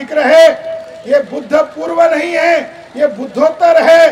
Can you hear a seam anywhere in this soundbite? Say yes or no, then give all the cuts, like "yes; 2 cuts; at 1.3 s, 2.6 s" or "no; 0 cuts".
no; 0 cuts